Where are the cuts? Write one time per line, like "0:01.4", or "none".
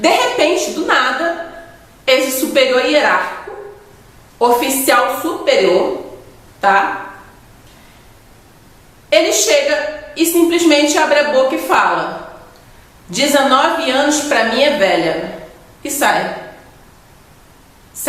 none

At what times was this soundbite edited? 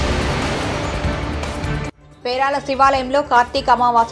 0:01.1

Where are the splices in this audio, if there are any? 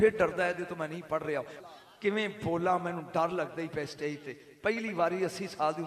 0:01.6

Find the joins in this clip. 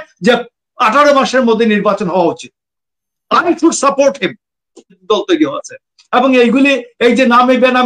0:05.0

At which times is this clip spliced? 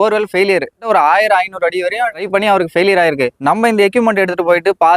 0:02.2

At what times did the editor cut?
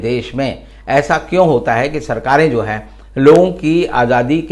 none

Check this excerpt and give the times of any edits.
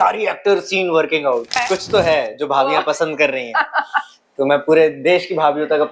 0:01.6

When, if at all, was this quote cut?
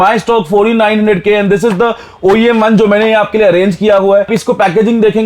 0:04.3

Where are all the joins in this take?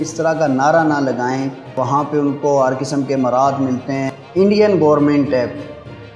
0:01.8
0:04.1

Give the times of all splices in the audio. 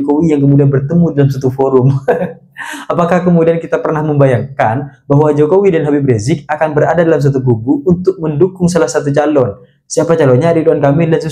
none

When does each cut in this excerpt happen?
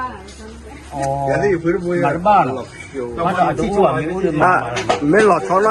none

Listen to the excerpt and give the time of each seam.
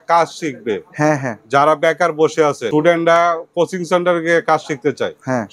0:02.6

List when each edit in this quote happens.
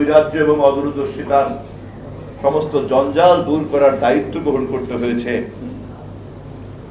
none

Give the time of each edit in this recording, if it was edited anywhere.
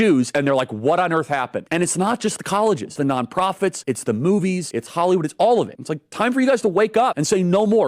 none

